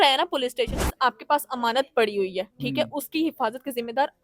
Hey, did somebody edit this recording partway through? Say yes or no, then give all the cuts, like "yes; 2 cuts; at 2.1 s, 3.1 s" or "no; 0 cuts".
yes; 1 cut; at 0.9 s